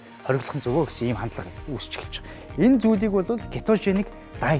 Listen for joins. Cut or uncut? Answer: uncut